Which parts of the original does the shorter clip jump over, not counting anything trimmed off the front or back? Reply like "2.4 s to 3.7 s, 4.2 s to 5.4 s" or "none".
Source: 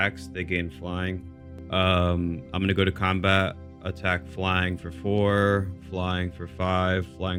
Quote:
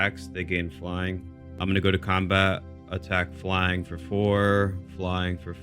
1.5 s to 2.4 s